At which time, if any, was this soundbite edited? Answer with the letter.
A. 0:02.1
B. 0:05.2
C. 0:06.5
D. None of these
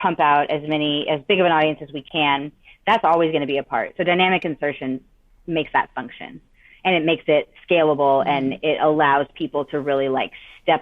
D